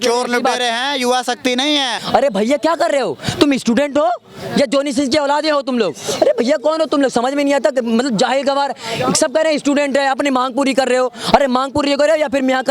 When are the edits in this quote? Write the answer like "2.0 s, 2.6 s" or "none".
2.0 s